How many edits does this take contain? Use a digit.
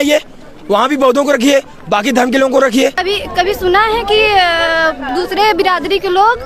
1